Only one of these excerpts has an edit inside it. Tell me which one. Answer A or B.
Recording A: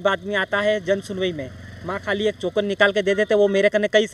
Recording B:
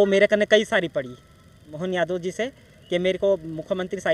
B